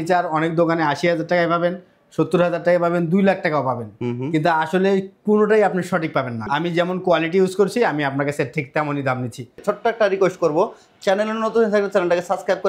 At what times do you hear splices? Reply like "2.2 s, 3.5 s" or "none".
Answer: 6.4 s, 9.6 s